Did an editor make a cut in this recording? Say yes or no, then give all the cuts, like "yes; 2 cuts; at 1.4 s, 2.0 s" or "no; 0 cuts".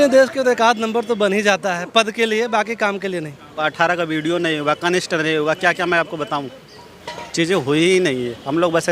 yes; 1 cut; at 3.5 s